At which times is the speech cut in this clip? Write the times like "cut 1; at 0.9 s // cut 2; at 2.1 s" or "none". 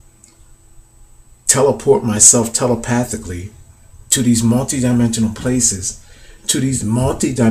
cut 1; at 4.3 s